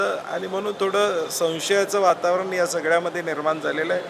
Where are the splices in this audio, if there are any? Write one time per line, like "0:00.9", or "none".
none